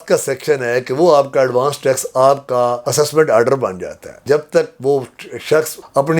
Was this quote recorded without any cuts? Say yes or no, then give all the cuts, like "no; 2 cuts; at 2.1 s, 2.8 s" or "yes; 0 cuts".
no; 1 cut; at 4.2 s